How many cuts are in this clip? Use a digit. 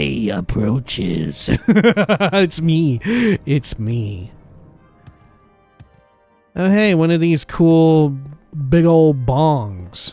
0